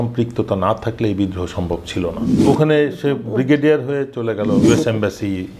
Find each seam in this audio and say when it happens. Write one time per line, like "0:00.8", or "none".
0:02.4
0:04.6

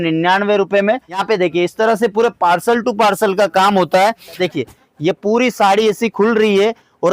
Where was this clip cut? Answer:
0:01.2
0:04.4

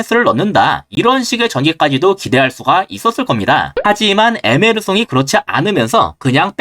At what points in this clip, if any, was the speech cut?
0:03.7

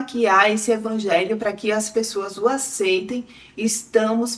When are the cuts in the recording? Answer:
none

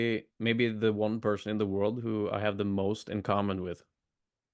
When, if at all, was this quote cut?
none

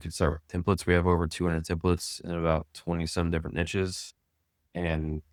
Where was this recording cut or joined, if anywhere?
none

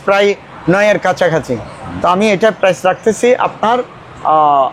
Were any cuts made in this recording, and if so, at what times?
none

